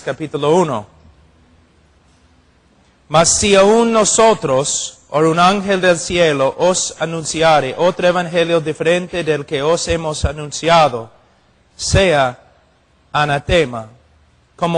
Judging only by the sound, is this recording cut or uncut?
cut